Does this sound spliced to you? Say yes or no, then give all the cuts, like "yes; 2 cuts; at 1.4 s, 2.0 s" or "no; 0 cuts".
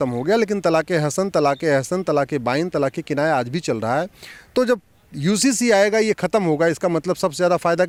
no; 0 cuts